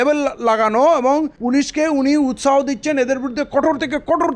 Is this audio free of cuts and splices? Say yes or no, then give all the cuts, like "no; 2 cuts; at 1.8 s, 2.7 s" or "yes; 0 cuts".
no; 1 cut; at 1.3 s